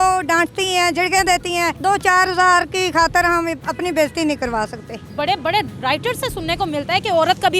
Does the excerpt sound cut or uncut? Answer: cut